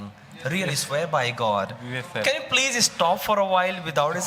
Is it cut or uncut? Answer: uncut